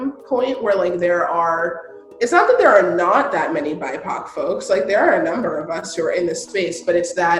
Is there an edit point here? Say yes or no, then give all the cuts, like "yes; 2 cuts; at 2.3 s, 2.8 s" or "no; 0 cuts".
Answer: no; 0 cuts